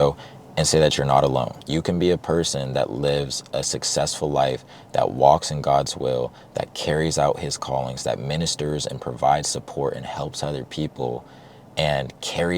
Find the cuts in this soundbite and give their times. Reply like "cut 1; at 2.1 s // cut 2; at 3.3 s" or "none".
cut 1; at 1.6 s